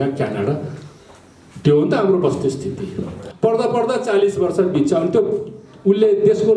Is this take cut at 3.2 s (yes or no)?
yes